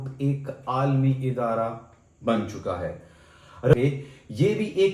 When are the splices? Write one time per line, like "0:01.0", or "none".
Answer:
0:03.7